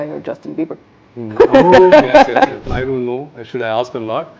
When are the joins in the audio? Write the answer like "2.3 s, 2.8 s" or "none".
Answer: 2.7 s